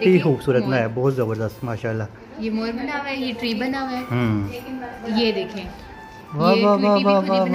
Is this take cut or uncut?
uncut